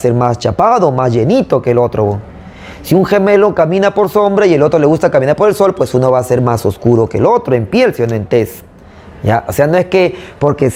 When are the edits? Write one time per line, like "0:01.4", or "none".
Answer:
none